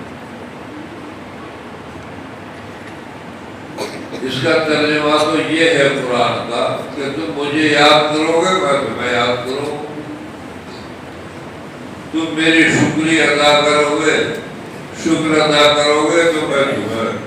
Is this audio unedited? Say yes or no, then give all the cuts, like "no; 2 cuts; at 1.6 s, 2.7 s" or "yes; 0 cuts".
yes; 0 cuts